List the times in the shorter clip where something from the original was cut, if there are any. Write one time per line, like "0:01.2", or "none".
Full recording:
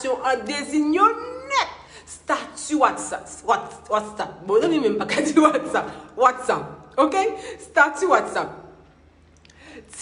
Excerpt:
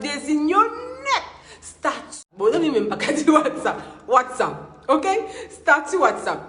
0:02.2